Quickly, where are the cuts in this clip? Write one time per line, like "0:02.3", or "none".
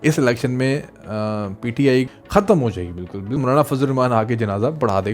0:03.4